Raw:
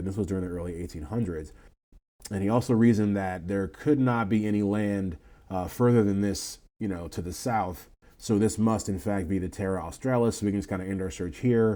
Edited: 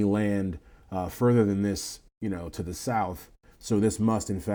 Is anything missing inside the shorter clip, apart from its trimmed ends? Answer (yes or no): no